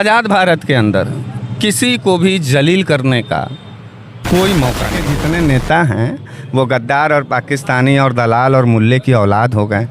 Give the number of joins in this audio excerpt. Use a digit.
1